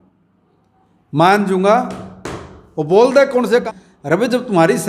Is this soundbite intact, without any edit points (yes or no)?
no